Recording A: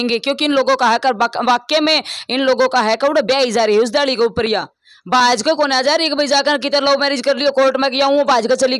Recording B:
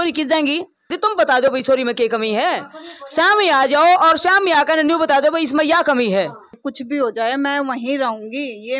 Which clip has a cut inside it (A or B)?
B